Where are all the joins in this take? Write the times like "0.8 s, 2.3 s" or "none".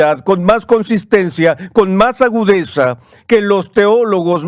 none